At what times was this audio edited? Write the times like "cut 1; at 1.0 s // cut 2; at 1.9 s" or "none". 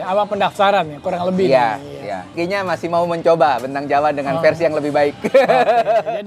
cut 1; at 2.3 s